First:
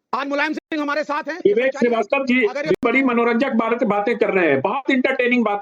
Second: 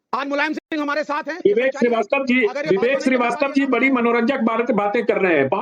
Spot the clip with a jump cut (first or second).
first